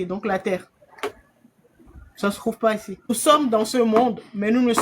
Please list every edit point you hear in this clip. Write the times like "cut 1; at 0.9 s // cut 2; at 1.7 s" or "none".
cut 1; at 3.1 s